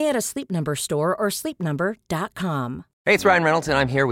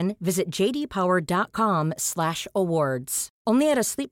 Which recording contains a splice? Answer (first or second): first